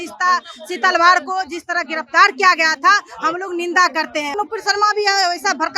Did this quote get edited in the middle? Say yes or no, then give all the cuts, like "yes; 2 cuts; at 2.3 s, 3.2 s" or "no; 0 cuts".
yes; 1 cut; at 4.4 s